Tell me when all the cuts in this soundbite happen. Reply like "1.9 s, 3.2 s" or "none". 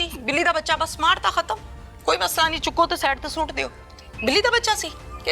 none